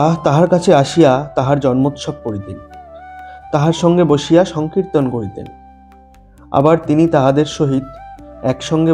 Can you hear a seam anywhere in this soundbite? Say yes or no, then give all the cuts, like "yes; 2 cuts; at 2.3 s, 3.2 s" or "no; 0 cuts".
no; 0 cuts